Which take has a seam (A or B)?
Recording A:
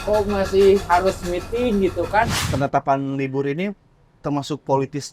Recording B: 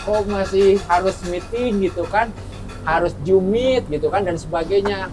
A